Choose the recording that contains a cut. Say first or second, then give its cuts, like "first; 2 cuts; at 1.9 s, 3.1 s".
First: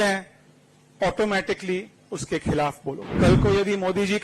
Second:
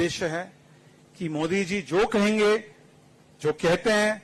first; 1 cut; at 3.1 s